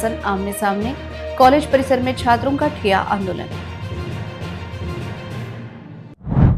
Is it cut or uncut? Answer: uncut